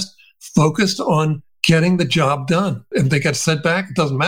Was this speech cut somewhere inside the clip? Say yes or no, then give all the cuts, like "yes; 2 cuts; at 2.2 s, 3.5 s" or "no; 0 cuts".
yes; 1 cut; at 2.9 s